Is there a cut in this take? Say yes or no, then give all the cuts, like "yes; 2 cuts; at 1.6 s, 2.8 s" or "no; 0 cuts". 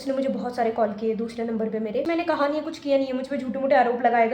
yes; 1 cut; at 2.1 s